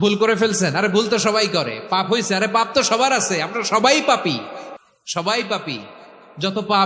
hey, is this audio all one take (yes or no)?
yes